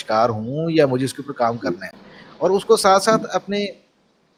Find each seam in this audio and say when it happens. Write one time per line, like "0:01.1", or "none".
none